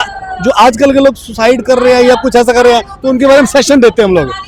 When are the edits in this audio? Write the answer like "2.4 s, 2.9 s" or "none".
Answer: none